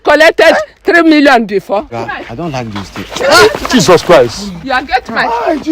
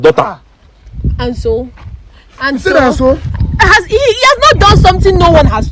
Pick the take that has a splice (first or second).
first